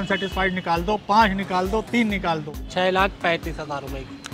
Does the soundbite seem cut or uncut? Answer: cut